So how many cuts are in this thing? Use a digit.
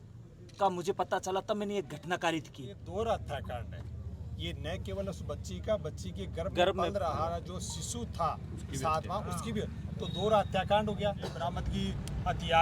2